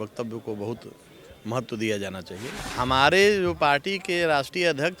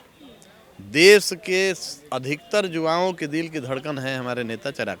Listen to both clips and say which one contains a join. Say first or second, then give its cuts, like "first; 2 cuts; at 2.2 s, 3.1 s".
first; 1 cut; at 2.6 s